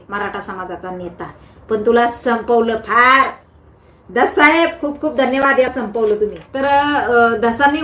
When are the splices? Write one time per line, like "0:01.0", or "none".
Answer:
0:06.5

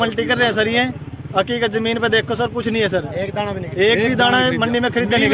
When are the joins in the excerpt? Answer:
none

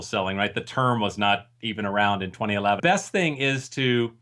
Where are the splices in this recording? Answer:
0:02.8

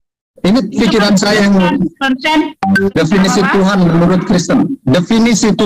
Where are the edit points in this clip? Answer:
0:02.9

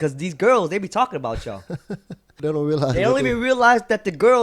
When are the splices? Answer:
0:02.4

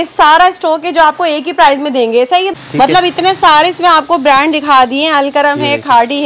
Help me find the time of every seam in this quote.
0:02.5

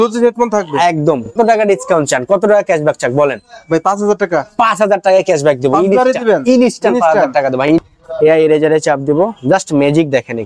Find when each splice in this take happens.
0:01.4
0:07.7

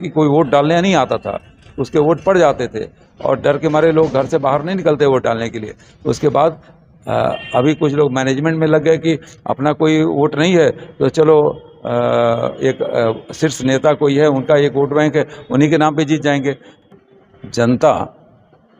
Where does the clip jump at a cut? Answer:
0:16.8

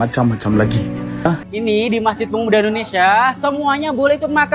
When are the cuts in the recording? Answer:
0:01.4

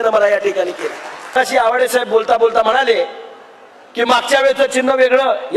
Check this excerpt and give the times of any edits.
0:01.3

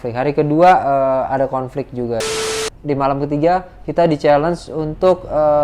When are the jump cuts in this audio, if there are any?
0:02.4

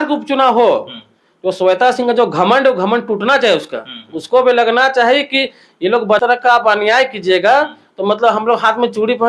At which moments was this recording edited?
0:06.2

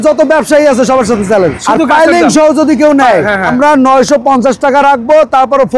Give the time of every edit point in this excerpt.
0:01.6
0:03.5

